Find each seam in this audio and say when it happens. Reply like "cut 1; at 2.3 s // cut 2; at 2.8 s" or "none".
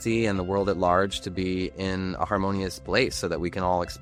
none